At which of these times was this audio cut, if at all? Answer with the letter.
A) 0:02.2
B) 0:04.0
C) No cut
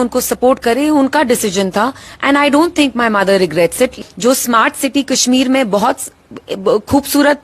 B